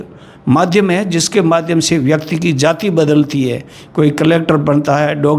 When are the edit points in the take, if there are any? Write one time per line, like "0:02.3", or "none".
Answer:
none